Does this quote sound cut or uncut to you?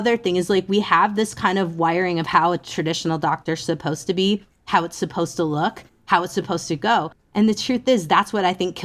uncut